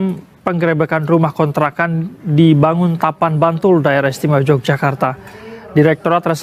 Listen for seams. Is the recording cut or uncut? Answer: uncut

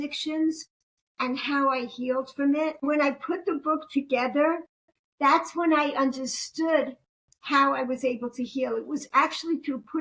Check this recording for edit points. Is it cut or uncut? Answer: cut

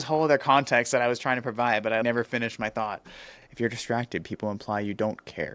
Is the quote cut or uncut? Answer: cut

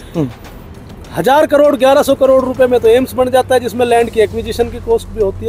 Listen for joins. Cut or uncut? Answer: uncut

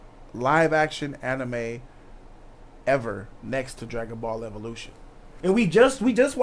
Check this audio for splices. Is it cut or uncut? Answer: cut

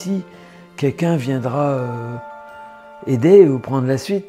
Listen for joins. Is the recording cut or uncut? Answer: uncut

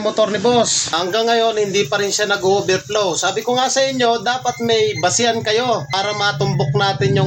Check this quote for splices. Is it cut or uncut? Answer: cut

